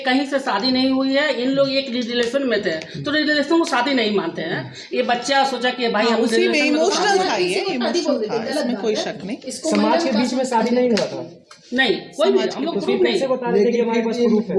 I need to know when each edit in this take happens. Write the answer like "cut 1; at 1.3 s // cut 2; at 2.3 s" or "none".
none